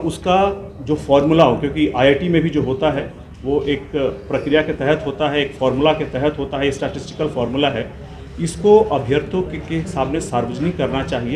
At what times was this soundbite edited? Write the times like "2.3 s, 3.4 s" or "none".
none